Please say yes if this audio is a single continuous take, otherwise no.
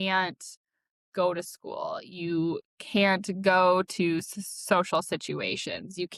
yes